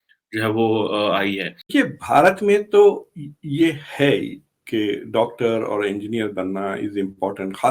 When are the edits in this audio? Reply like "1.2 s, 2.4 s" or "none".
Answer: 1.9 s